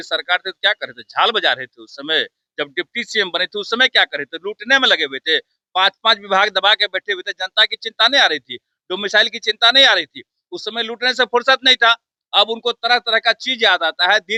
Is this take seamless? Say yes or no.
yes